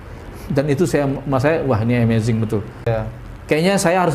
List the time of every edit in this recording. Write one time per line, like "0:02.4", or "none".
0:02.9